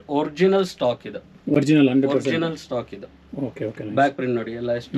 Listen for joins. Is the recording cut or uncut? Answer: uncut